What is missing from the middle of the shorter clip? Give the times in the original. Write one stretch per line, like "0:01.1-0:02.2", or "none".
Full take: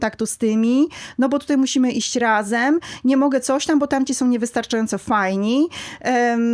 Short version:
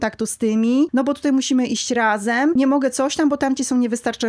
0:00.9-0:01.1
0:02.8-0:03.0